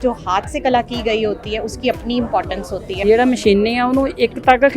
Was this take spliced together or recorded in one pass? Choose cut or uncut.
cut